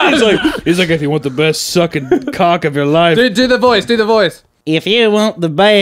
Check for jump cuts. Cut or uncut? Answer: cut